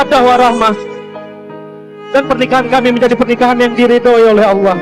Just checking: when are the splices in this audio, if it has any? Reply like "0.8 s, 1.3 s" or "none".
none